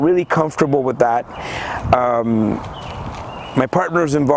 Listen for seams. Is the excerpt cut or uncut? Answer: uncut